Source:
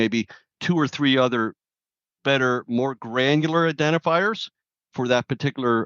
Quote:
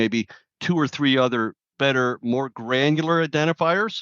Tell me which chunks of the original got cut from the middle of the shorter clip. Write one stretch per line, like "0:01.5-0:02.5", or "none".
0:01.6-0:02.1